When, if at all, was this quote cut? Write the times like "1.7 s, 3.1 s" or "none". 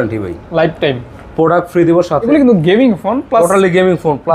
2.3 s